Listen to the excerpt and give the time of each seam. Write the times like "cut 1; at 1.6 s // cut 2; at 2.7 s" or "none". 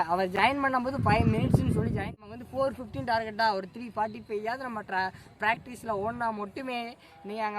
cut 1; at 2.0 s